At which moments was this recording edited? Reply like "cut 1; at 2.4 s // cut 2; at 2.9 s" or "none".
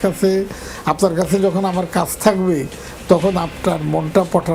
none